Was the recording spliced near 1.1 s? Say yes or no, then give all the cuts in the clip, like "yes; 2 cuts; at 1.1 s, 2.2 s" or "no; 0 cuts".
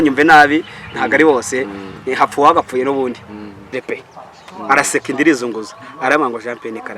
no; 1 cut; at 3.7 s